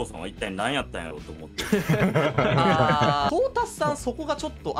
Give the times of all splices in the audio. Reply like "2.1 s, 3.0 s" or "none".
3.3 s

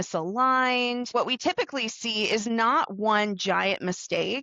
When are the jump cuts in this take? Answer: 1.1 s

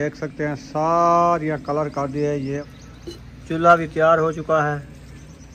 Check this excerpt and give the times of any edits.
2.6 s

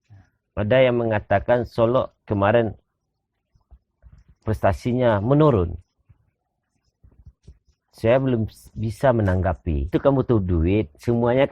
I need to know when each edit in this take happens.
9.9 s

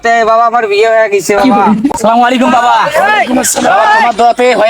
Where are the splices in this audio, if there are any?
2.0 s

